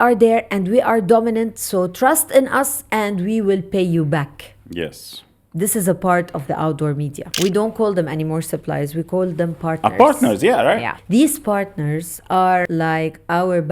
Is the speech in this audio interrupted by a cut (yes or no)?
yes